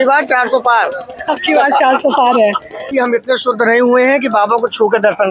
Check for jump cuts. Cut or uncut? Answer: cut